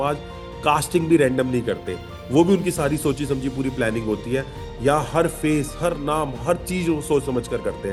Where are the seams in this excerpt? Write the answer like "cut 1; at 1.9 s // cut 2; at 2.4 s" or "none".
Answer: none